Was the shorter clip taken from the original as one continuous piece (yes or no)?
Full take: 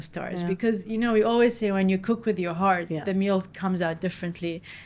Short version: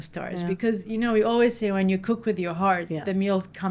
yes